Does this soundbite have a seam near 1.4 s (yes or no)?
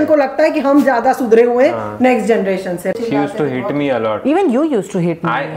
no